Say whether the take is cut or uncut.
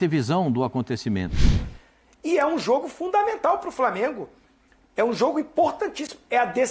cut